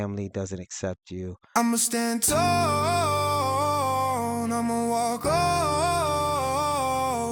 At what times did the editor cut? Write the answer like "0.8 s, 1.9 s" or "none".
1.4 s

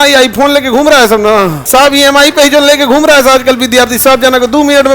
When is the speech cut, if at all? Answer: 1.6 s

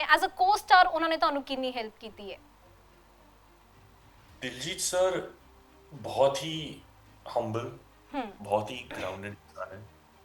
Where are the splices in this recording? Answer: none

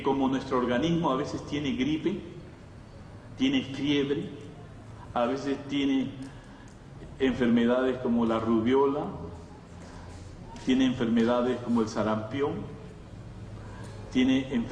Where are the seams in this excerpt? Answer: 7.1 s

